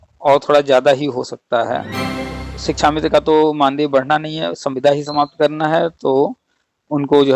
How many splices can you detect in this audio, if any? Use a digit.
1